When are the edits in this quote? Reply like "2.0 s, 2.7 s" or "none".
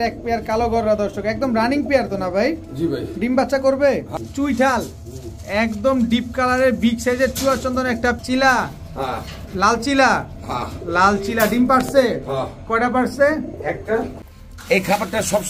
4.2 s, 8.2 s, 14.2 s